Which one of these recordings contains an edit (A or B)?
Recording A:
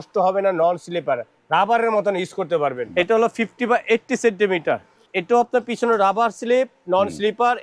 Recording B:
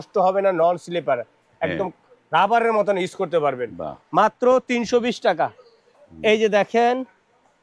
A